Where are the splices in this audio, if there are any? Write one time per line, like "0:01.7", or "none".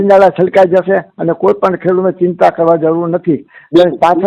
none